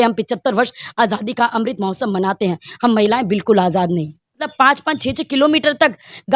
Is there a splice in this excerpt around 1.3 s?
no; 1 cut; at 4.5 s

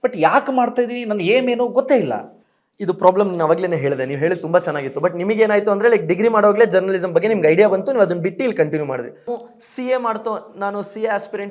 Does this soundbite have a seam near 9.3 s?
yes; 1 cut; at 9.3 s

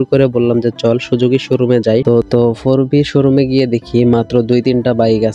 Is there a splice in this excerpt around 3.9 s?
no; 1 cut; at 2.2 s

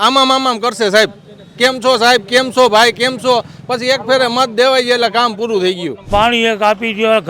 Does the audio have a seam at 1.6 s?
no; 1 cut; at 6.1 s

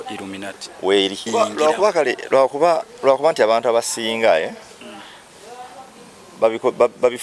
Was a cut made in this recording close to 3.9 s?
no; 1 cut; at 1.3 s

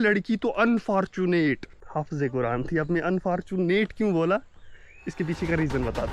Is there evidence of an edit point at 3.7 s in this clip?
no; 1 cut; at 1.8 s

